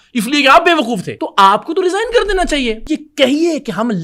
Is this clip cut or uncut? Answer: cut